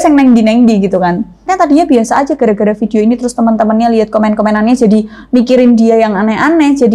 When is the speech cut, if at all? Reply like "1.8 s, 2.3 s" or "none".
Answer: 1.5 s